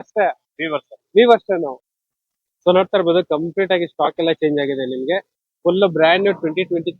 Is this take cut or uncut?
cut